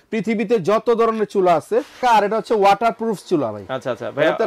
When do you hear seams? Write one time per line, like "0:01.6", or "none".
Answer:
0:01.9